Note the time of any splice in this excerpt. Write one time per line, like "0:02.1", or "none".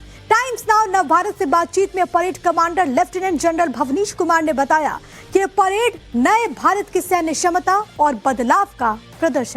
none

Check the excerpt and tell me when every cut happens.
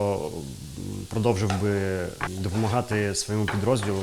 0:02.3

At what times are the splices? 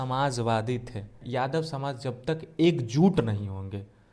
0:01.2

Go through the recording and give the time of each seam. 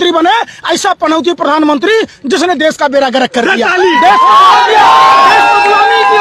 none

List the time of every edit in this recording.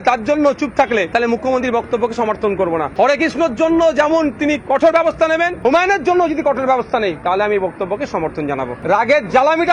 0:01.1
0:02.9
0:05.5
0:08.7

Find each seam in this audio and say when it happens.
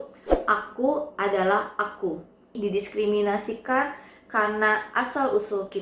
0:02.6

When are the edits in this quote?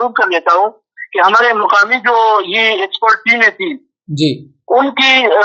none

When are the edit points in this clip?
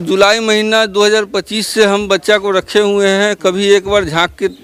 none

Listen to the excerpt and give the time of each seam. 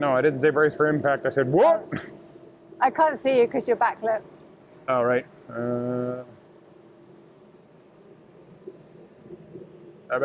none

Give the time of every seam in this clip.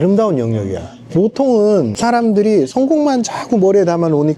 0:01.9

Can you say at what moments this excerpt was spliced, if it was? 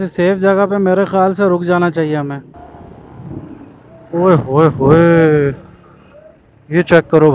0:02.5

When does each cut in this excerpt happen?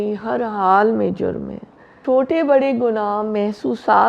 0:01.9

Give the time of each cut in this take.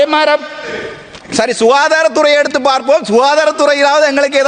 none

